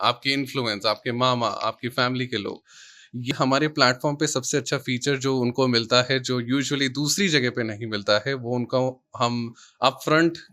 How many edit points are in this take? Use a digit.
1